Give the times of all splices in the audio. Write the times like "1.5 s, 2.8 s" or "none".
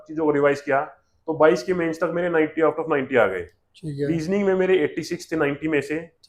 none